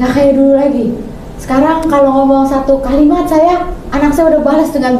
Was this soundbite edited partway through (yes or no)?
no